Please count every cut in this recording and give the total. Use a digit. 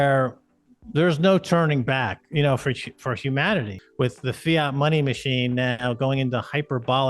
1